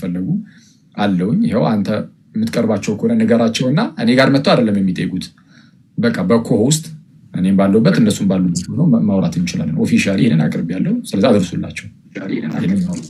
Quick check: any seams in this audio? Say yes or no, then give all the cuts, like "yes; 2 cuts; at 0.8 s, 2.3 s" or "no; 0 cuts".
no; 0 cuts